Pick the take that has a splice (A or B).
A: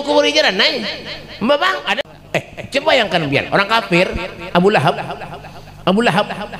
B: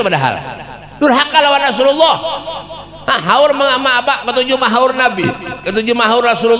A